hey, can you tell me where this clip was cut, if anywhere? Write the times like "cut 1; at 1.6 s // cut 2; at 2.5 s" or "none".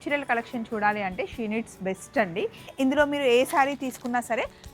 cut 1; at 2.7 s